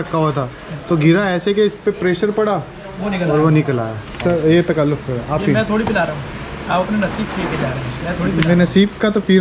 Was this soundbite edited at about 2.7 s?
no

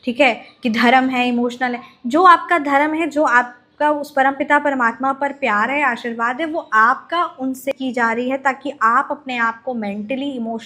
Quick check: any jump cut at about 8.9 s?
no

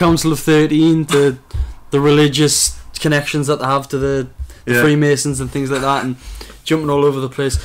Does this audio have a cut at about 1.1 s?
yes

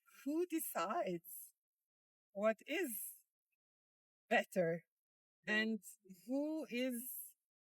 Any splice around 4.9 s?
yes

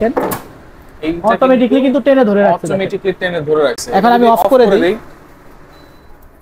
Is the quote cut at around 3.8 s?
no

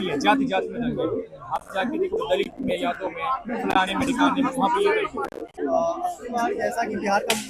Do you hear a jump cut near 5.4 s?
yes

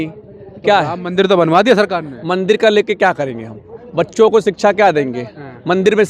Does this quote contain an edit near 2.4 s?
no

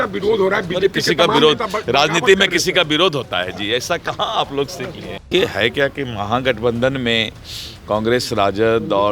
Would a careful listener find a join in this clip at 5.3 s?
yes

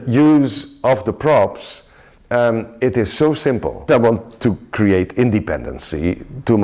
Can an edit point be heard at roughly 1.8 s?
no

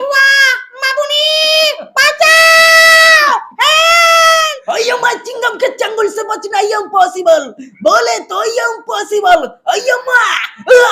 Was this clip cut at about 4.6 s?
yes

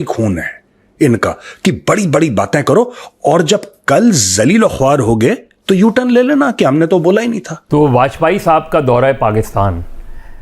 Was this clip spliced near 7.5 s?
yes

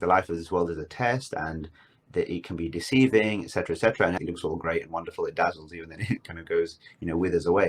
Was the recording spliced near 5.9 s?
no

